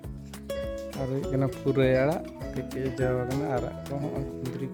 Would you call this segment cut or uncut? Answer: uncut